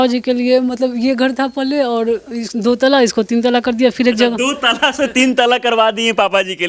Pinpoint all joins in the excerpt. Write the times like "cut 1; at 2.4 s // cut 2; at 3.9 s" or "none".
none